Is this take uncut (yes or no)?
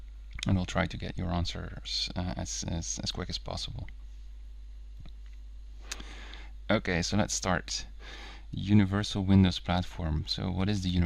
no